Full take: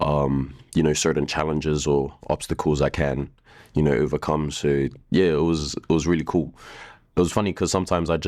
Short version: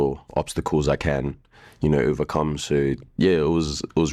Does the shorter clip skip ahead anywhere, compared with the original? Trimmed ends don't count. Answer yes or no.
no